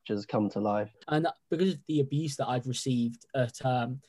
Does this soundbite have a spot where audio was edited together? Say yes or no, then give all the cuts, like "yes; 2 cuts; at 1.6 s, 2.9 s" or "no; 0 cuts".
yes; 1 cut; at 0.9 s